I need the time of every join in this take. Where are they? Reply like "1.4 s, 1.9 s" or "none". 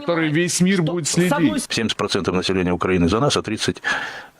1.7 s